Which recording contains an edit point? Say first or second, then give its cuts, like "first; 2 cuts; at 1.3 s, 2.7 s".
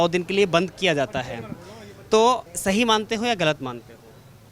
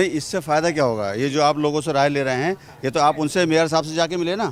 first; 1 cut; at 2.4 s